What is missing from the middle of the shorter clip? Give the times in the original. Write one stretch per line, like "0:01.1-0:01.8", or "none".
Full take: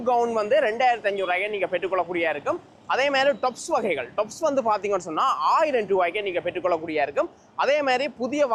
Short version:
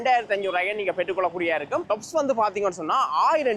0:02.6-0:04.1